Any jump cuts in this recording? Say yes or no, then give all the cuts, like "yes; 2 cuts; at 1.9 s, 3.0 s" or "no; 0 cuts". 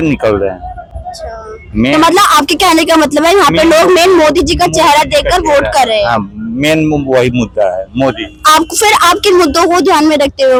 no; 0 cuts